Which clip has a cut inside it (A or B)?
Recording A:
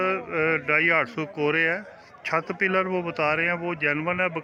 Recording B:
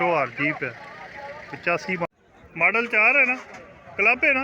B